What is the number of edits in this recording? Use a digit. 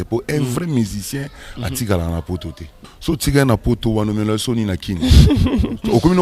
1